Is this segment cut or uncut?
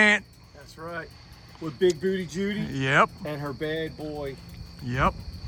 uncut